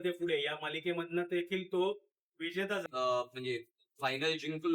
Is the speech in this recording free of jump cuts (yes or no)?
no